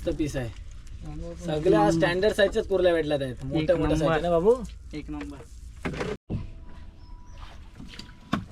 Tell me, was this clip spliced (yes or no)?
yes